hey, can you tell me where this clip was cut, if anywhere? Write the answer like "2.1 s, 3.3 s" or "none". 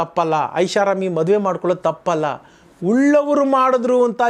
none